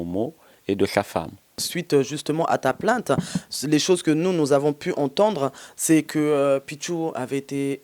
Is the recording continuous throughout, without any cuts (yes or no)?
no